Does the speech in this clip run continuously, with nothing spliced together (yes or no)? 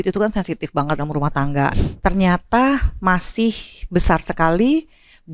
no